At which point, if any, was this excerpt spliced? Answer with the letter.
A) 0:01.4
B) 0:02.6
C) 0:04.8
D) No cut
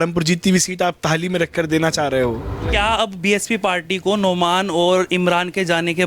B